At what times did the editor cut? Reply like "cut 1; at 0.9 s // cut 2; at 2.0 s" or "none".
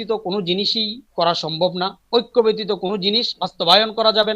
cut 1; at 2.0 s